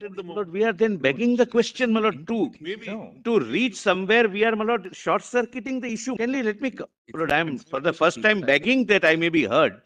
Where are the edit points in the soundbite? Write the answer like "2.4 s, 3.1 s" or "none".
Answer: 6.2 s